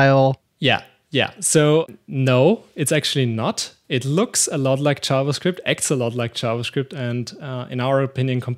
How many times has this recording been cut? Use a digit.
0